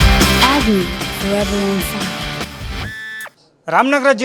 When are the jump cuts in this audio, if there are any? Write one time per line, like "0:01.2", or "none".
0:03.2